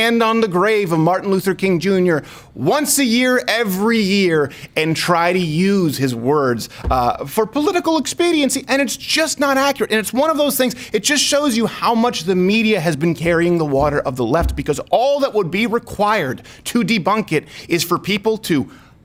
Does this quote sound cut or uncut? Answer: uncut